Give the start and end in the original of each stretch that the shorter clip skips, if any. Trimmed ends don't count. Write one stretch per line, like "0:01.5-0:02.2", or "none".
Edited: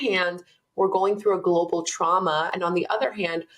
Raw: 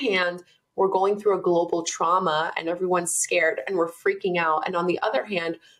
0:02.5-0:04.7